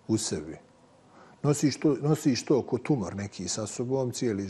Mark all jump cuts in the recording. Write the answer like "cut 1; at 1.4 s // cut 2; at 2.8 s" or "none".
none